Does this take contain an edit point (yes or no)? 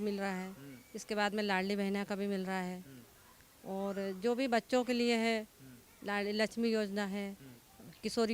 no